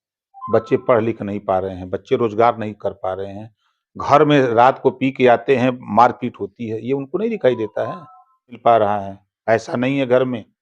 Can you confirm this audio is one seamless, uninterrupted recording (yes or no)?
no